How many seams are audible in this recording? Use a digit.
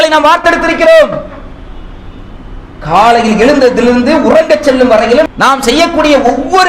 1